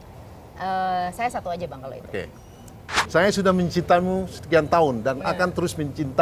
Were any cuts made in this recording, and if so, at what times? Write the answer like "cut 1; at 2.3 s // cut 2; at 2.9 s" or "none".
cut 1; at 2.9 s